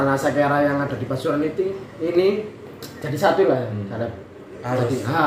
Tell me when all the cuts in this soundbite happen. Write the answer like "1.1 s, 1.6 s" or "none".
none